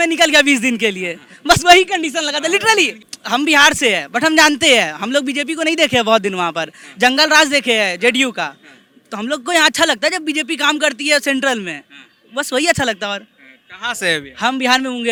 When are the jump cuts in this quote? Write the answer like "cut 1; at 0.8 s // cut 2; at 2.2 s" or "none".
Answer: none